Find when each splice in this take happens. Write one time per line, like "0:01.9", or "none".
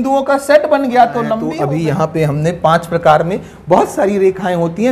0:01.5